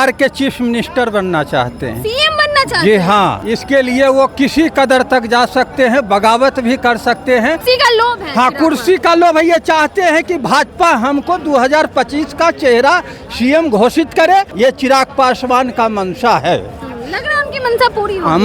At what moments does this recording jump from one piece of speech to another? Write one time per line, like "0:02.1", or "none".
0:03.4
0:07.6
0:14.5

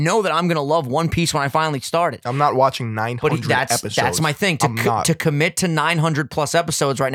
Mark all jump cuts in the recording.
none

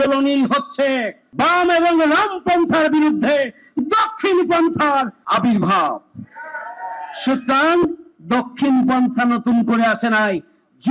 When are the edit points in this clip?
0:01.2
0:05.2

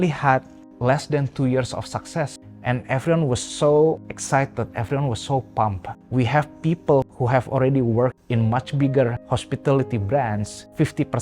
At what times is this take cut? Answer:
0:02.4
0:07.1
0:09.2

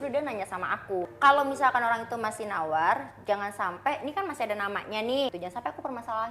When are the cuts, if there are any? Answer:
0:01.1
0:05.4

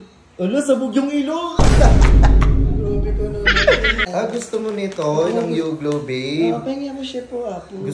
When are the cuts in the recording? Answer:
0:04.1

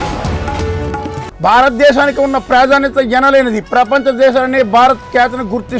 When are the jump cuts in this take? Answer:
none

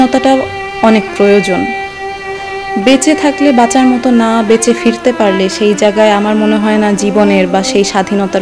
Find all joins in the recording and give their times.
none

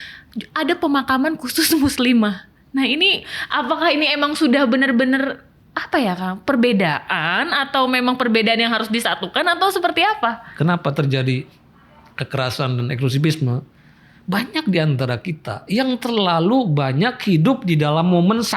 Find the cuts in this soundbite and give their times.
0:03.4
0:10.5

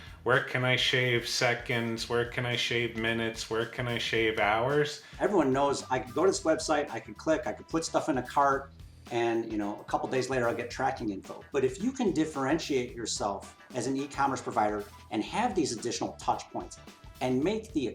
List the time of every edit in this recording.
0:05.1

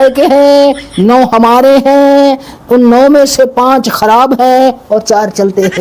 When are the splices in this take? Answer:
none

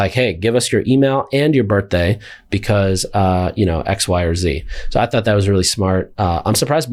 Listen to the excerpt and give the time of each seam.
none

